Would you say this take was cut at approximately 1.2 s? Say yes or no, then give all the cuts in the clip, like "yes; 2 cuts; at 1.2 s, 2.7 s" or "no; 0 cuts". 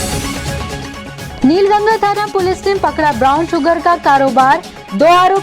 yes; 1 cut; at 1.2 s